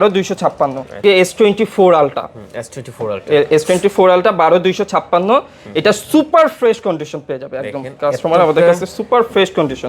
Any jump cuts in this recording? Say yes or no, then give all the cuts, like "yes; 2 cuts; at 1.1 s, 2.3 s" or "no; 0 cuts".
yes; 1 cut; at 1.0 s